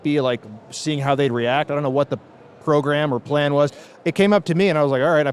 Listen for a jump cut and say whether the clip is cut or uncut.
uncut